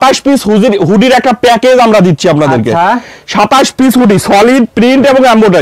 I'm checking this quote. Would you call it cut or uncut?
uncut